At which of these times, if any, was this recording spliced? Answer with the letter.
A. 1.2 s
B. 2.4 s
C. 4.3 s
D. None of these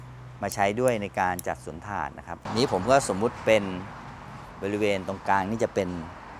B